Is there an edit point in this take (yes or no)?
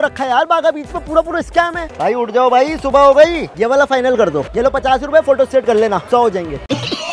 yes